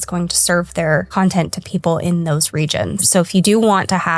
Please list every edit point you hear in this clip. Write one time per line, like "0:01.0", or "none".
0:01.1
0:03.0